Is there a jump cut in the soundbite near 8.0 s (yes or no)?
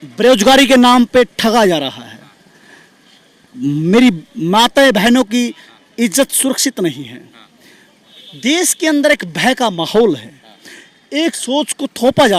yes